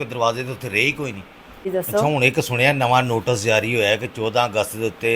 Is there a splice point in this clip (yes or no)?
yes